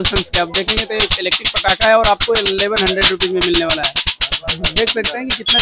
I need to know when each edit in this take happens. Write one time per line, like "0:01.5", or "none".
none